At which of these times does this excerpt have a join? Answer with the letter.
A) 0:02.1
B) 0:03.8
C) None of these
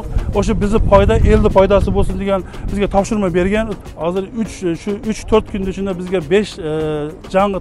B